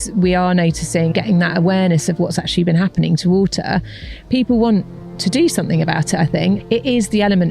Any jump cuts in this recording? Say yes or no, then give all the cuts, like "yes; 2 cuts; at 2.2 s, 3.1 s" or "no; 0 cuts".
yes; 2 cuts; at 1.1 s, 6.6 s